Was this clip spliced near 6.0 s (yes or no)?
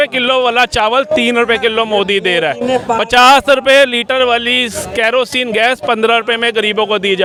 no